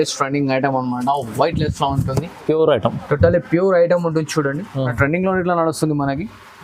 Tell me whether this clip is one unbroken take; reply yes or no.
no